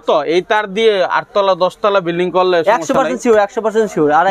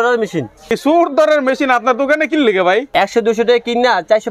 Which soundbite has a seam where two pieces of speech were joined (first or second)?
second